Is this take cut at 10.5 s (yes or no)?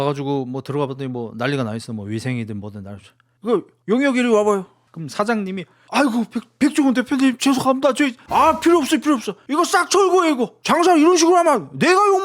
yes